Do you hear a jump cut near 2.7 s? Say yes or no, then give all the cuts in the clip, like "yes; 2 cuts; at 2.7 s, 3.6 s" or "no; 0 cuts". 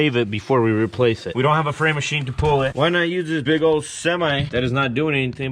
yes; 2 cuts; at 1.3 s, 2.7 s